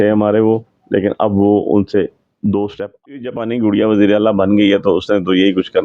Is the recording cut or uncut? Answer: cut